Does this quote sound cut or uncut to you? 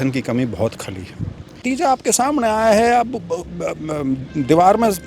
cut